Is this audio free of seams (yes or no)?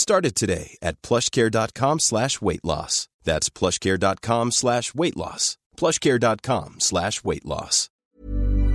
no